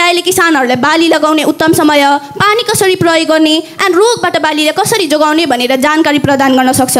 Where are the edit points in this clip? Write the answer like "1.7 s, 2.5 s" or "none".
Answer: none